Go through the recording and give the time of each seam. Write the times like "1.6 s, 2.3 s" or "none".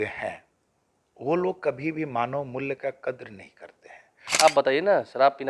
4.2 s